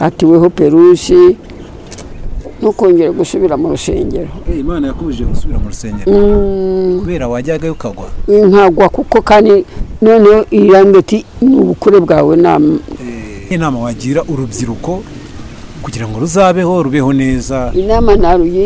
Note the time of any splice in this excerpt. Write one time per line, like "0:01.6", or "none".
0:13.5